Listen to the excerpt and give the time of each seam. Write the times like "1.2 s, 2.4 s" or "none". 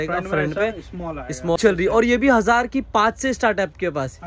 1.6 s

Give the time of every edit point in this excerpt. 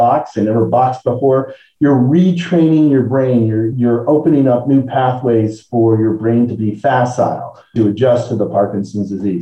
3.7 s

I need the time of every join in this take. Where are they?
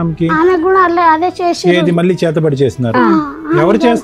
none

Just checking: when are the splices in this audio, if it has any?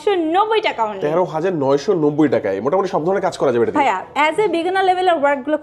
none

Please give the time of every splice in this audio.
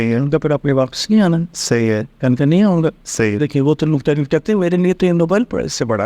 none

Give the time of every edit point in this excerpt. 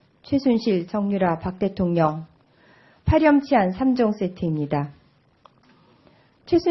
none

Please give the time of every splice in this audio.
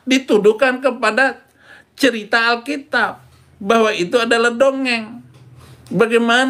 5.4 s

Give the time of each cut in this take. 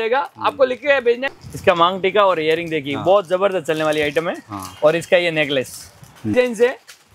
1.3 s, 6.3 s

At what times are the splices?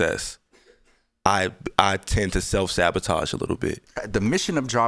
4.0 s

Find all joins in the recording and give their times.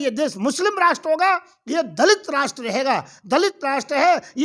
none

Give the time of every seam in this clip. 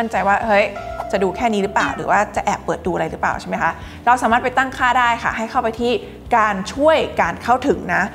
none

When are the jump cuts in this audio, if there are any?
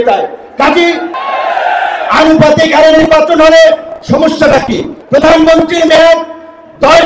1.1 s, 4.9 s

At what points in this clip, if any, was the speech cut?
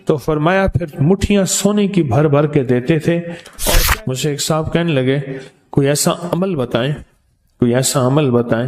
3.8 s

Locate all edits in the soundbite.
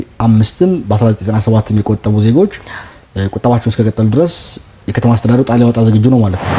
none

